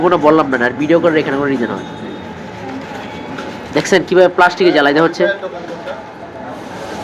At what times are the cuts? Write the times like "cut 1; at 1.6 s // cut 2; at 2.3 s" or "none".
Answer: none